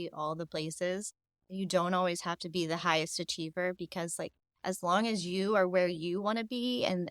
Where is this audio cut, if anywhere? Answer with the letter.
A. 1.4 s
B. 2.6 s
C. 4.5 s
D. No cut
D